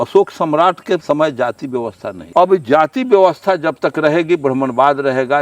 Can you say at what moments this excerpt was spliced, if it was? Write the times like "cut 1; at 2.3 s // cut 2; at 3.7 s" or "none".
cut 1; at 1.0 s // cut 2; at 2.1 s